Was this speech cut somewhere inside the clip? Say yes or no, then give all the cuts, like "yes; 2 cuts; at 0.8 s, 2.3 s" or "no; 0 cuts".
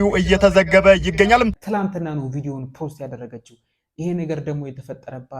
yes; 1 cut; at 1.6 s